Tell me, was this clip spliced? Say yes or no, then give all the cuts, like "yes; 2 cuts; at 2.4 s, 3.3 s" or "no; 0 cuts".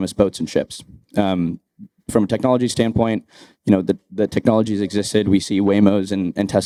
no; 0 cuts